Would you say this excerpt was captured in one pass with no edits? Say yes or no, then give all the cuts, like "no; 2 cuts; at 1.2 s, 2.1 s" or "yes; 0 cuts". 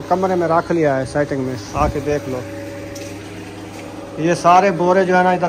yes; 0 cuts